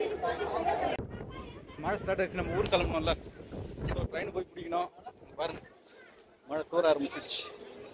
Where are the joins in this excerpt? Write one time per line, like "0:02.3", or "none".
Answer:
0:01.1